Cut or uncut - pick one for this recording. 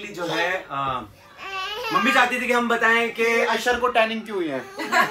uncut